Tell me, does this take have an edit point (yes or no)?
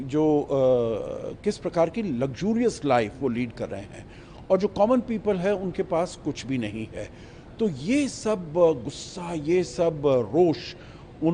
no